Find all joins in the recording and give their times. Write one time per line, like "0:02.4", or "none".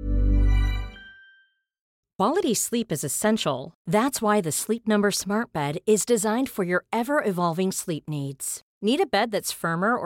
0:02.0